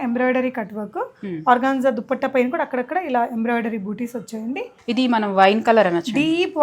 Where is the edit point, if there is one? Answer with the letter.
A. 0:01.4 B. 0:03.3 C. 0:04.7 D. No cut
C